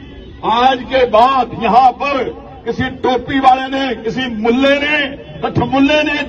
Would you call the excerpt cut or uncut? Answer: uncut